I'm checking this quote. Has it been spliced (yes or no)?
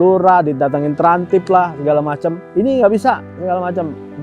yes